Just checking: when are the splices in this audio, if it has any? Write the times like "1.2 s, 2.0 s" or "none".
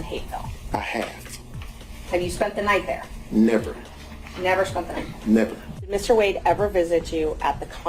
5.9 s